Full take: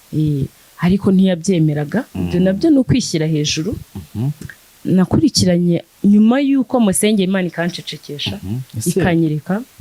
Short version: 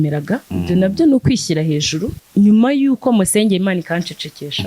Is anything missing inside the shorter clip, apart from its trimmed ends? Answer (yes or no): yes